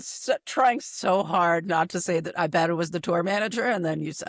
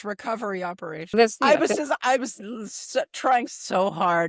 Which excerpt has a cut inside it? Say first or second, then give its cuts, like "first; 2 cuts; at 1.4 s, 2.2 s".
second; 1 cut; at 0.9 s